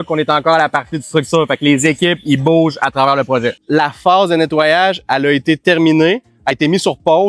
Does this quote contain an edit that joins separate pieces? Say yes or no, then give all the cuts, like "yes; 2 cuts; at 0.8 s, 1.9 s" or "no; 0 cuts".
yes; 1 cut; at 3.6 s